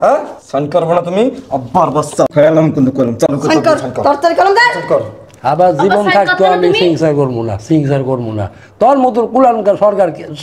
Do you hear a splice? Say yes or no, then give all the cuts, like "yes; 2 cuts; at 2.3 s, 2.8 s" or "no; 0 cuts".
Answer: yes; 1 cut; at 2.3 s